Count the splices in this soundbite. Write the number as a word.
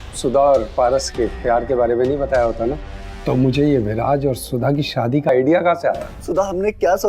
one